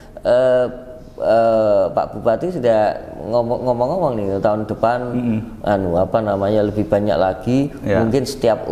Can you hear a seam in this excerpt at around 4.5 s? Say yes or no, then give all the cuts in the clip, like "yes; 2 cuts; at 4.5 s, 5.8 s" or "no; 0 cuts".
no; 0 cuts